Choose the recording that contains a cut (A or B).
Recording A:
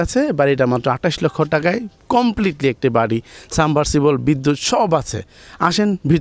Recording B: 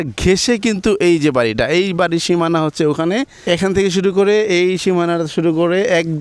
B